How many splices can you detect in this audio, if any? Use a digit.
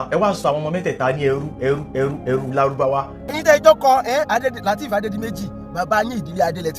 1